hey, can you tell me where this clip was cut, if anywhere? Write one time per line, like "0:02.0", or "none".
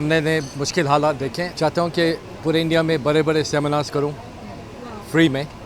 0:01.5